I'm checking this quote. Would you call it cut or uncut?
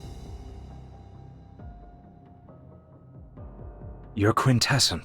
cut